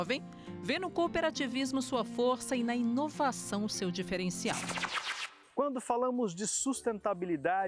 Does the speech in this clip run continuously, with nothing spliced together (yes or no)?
no